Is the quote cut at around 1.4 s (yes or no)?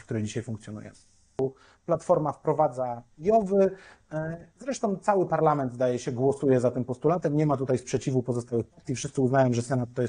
yes